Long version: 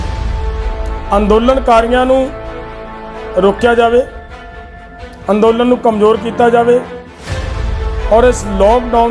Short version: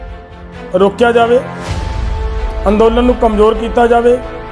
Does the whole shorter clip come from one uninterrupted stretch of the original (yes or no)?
yes